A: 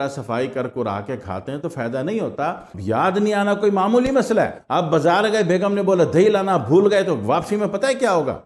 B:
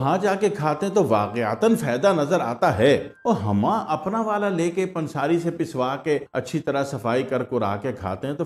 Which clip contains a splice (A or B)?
A